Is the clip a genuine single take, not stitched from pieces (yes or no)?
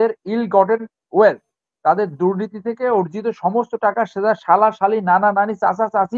yes